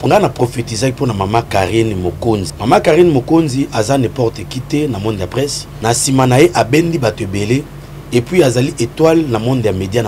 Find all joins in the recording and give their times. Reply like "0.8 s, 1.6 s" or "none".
2.5 s, 5.7 s

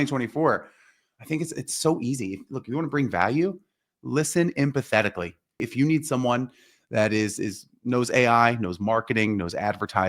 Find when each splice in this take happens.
5.7 s

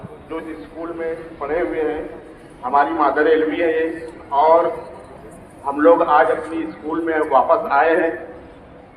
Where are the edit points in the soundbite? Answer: none

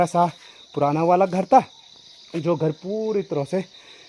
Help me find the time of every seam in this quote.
none

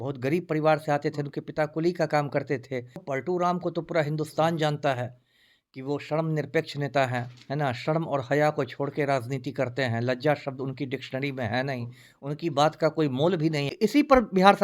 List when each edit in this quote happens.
3.0 s, 13.7 s

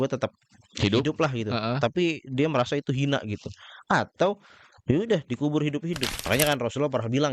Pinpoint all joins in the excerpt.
6.2 s

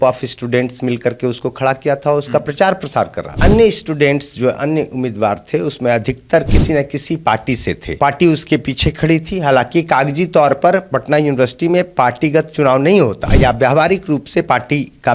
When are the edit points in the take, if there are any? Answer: 3.3 s, 7.9 s, 13.2 s

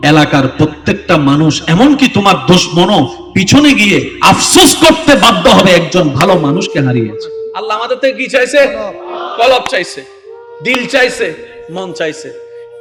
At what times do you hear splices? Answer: none

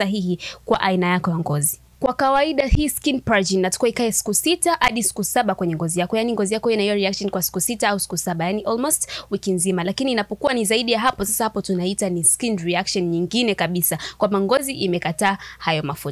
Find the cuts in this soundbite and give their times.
none

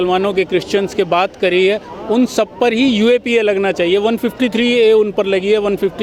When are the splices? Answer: none

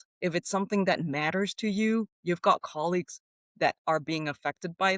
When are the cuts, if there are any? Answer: none

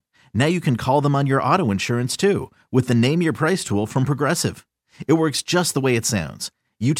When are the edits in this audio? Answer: none

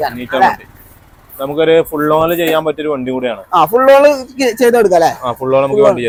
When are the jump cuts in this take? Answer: none

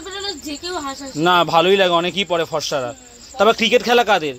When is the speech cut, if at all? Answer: none

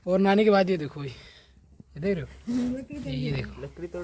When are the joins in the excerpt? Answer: none

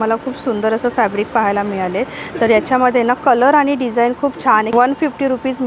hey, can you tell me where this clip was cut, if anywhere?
4.7 s

